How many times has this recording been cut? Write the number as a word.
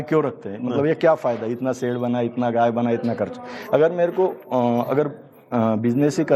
zero